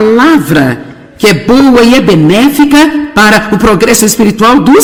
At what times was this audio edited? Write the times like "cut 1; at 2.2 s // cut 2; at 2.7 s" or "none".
none